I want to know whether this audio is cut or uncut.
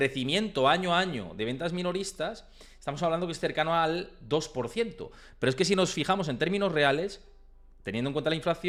uncut